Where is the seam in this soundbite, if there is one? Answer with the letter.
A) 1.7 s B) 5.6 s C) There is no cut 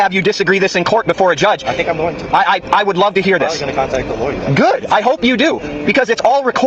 C